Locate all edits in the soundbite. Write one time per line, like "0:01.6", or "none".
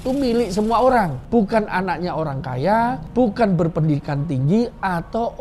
0:01.2
0:03.0